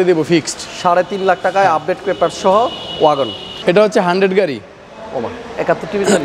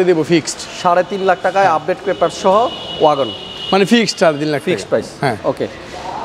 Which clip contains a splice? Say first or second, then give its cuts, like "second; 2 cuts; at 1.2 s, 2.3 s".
first; 1 cut; at 3.5 s